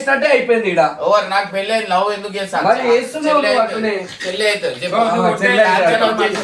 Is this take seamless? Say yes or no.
yes